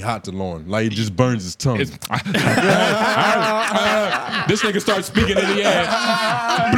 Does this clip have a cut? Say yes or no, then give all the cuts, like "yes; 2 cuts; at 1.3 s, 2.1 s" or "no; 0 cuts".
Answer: no; 0 cuts